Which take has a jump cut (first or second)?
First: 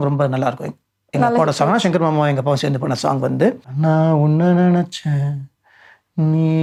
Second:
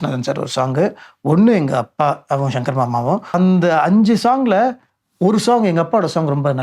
second